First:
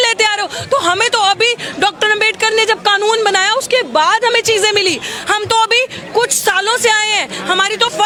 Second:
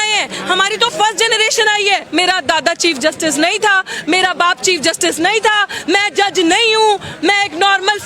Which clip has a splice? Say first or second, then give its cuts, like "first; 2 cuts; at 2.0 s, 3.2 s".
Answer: second; 1 cut; at 2.1 s